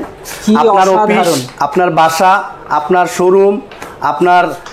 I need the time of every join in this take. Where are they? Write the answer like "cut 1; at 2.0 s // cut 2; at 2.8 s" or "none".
none